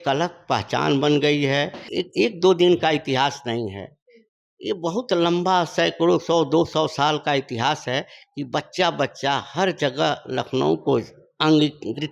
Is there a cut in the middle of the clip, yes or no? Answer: yes